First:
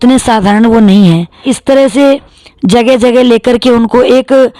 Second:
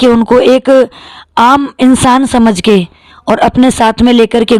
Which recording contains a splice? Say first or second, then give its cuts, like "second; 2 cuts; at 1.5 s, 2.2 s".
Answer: first; 1 cut; at 1.5 s